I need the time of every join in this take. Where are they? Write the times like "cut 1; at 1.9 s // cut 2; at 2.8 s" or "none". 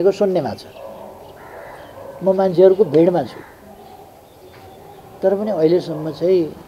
none